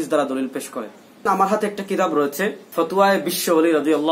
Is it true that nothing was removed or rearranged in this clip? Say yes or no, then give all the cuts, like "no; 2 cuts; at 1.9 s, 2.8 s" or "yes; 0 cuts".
no; 2 cuts; at 1.3 s, 2.6 s